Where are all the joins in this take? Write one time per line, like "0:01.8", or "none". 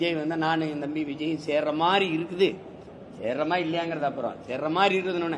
none